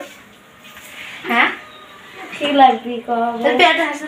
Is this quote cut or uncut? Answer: uncut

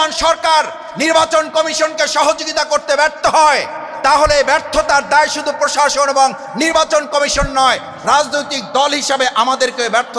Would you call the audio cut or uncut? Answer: uncut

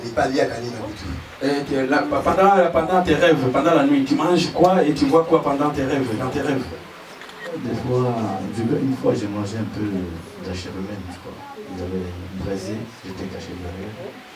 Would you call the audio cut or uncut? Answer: uncut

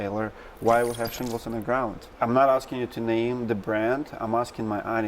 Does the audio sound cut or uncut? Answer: cut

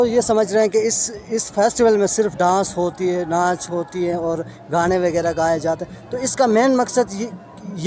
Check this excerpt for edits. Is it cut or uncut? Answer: uncut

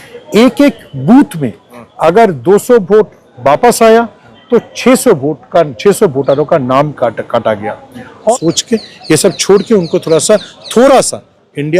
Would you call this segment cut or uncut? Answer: cut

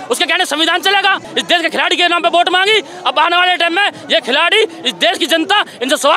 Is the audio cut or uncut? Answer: cut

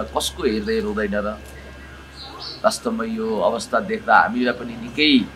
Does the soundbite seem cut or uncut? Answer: uncut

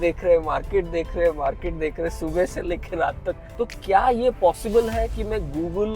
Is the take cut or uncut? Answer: cut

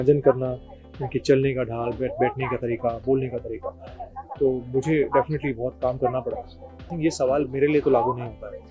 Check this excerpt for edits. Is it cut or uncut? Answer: cut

